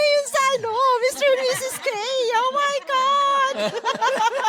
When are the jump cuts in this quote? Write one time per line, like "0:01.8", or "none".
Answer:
none